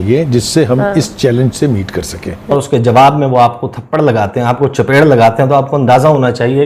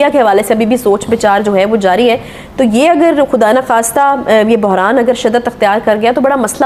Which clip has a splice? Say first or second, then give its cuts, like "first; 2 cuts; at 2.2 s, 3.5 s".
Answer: first; 1 cut; at 2.5 s